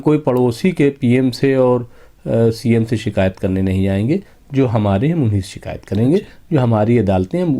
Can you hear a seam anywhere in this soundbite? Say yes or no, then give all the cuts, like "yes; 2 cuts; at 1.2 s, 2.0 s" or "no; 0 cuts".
no; 0 cuts